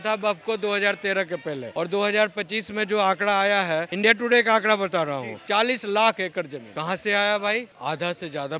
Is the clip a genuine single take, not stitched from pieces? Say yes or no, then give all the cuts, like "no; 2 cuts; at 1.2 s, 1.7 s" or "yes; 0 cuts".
no; 4 cuts; at 1.7 s, 3.9 s, 6.6 s, 7.7 s